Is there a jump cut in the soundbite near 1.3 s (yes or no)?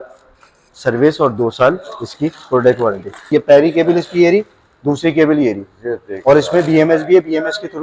no